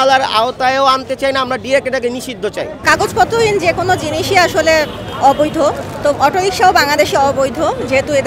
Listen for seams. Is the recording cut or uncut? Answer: uncut